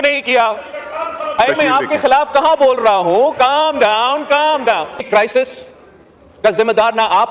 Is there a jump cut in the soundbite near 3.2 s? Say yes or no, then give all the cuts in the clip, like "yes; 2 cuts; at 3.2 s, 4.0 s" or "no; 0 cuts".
no; 2 cuts; at 1.4 s, 5.0 s